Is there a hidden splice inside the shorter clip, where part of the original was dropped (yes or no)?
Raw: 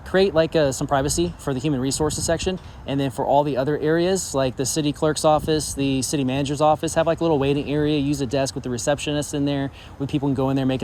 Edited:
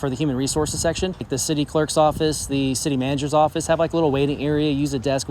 yes